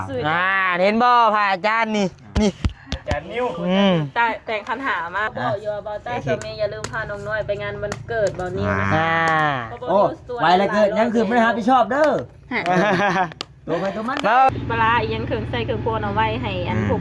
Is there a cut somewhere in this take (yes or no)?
yes